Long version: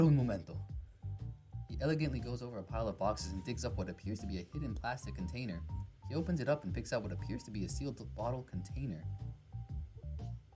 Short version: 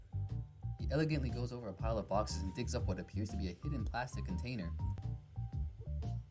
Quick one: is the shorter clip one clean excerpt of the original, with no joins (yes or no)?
no